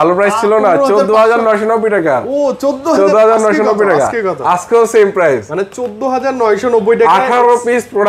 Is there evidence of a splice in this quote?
no; 0 cuts

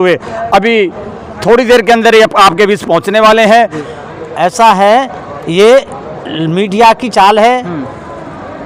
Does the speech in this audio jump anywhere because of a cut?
yes; 1 cut; at 3.9 s

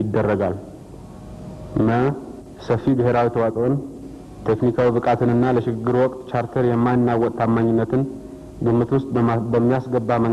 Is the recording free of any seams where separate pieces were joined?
yes; 0 cuts

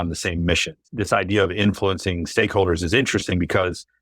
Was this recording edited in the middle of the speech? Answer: yes; 1 cut; at 0.9 s

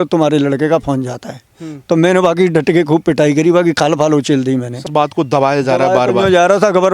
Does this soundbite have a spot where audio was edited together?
yes; 1 cut; at 4.9 s

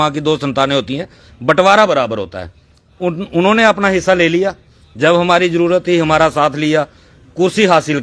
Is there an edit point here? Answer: yes; 1 cut; at 6.6 s

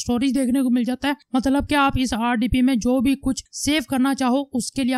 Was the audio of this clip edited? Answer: no; 0 cuts

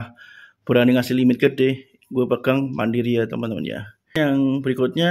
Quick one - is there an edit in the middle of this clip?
yes; 1 cut; at 4.2 s

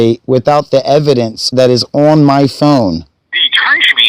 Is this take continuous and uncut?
no; 2 cuts; at 1.4 s, 3.0 s

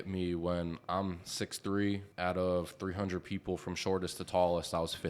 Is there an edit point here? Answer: yes; 1 cut; at 2.1 s

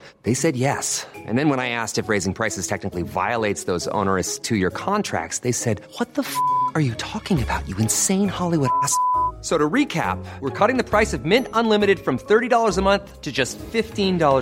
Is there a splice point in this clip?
no; 0 cuts

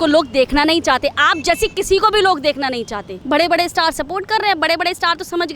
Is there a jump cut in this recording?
yes; 1 cut; at 3.2 s

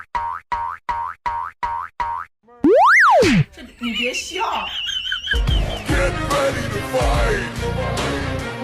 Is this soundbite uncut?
no; 1 cut; at 2.3 s

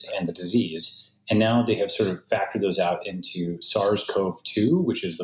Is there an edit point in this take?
no; 0 cuts

